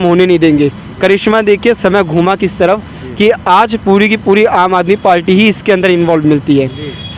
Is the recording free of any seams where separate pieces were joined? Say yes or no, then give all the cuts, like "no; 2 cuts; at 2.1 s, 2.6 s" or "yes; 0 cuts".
yes; 0 cuts